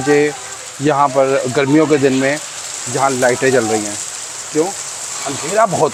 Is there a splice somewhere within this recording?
no; 0 cuts

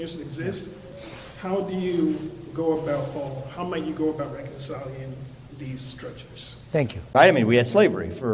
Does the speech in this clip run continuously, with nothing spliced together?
no; 1 cut; at 7.1 s

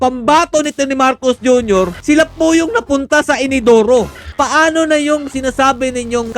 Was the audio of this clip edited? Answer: yes; 2 cuts; at 2.0 s, 4.3 s

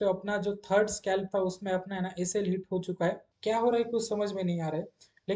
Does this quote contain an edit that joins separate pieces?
yes; 1 cut; at 3.3 s

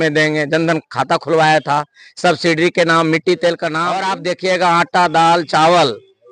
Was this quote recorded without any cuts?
no; 1 cut; at 4.1 s

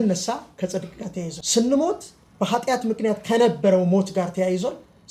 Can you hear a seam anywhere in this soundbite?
yes; 1 cut; at 1.4 s

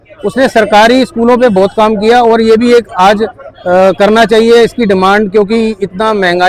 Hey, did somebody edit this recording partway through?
no; 0 cuts

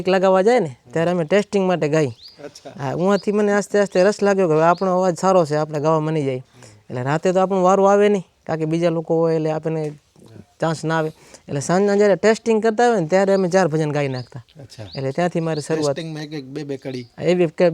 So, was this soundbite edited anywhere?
no; 0 cuts

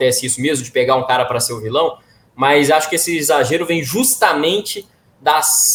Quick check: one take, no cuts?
yes; 0 cuts

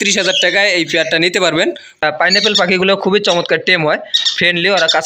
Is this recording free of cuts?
no; 1 cut; at 2.0 s

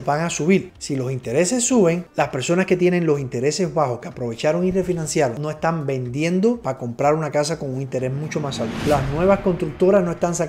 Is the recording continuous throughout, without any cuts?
no; 1 cut; at 2.0 s

